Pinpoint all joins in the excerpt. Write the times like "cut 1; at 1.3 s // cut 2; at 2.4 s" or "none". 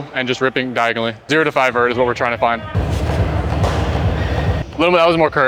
cut 1; at 1.2 s // cut 2; at 2.8 s // cut 3; at 4.7 s